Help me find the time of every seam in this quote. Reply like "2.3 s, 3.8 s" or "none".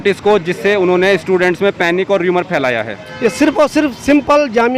3.0 s